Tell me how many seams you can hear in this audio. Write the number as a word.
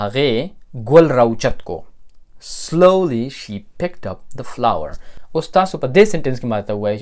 zero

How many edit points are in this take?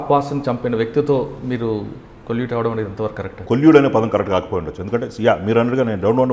one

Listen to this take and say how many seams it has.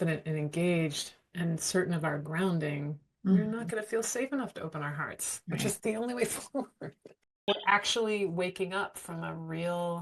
one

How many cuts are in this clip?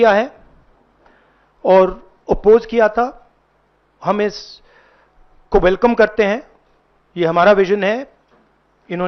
zero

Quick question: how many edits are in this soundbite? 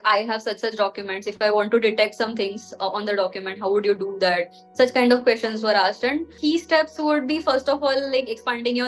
one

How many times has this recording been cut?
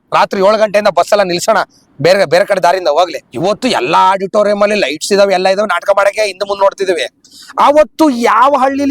one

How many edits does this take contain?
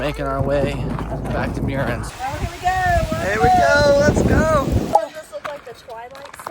two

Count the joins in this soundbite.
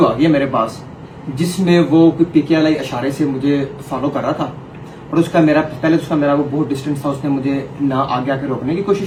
zero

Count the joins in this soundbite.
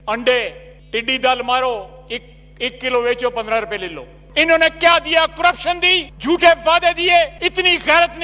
one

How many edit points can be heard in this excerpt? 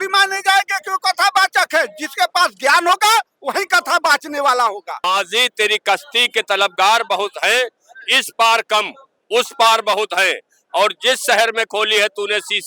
one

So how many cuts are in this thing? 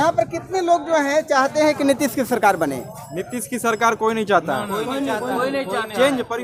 zero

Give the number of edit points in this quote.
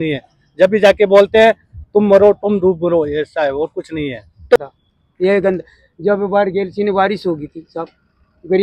one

